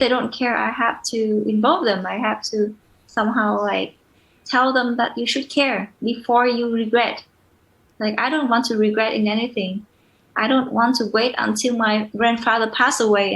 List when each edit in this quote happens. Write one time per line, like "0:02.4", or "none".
0:12.1